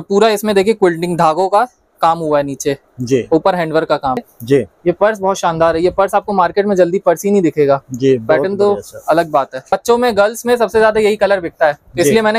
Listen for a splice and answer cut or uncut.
cut